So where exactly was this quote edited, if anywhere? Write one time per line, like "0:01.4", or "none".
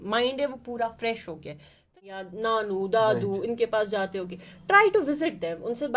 0:02.0